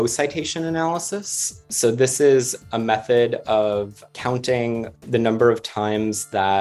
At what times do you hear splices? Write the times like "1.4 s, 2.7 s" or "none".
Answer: 1.7 s, 2.6 s, 4.0 s, 5.0 s